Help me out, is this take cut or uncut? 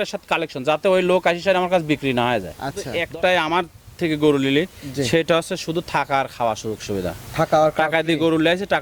cut